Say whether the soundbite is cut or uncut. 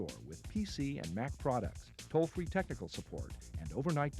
uncut